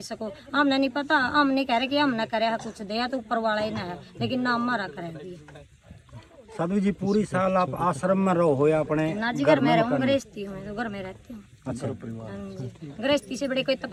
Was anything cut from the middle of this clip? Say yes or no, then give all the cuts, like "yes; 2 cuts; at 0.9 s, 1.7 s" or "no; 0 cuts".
no; 0 cuts